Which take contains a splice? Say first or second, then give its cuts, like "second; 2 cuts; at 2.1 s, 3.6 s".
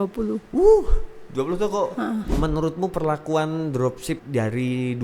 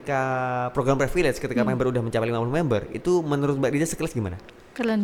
first; 2 cuts; at 2.3 s, 4.2 s